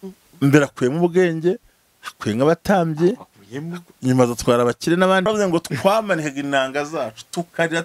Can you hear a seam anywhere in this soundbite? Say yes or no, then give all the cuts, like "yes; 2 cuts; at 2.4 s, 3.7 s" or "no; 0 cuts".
yes; 1 cut; at 5.3 s